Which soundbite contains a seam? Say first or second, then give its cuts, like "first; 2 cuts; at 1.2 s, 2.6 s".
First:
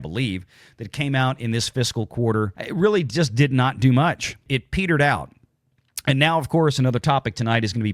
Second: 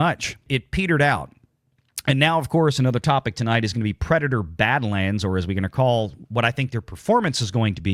first; 1 cut; at 2.6 s